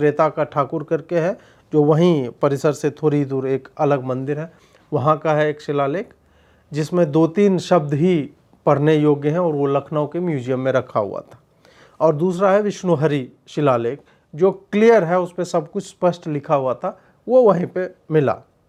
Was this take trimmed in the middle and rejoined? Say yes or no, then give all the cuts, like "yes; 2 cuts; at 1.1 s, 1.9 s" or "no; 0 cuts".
no; 0 cuts